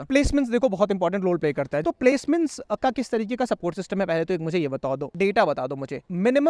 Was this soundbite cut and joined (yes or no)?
yes